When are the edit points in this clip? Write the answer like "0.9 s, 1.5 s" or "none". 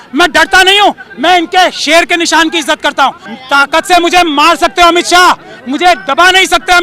3.3 s